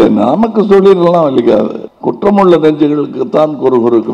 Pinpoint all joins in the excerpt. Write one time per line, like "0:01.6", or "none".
0:01.8